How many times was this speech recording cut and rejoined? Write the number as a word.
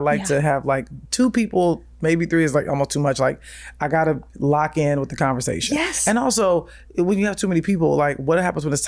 zero